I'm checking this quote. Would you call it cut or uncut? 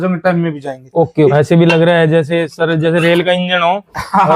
cut